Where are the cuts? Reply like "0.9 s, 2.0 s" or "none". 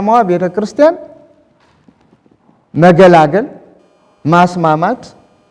none